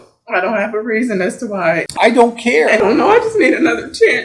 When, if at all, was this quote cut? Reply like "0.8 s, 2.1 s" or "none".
1.9 s, 2.8 s